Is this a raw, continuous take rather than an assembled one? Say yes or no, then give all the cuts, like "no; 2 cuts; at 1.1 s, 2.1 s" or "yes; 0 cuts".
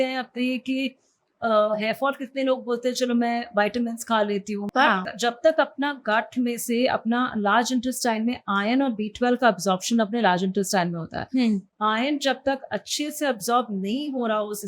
no; 1 cut; at 5.0 s